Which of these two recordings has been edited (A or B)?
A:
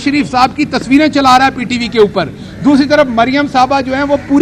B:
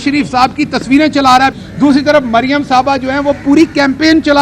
B